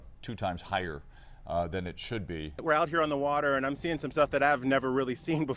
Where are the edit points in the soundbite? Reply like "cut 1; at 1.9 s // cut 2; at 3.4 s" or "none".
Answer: cut 1; at 2.6 s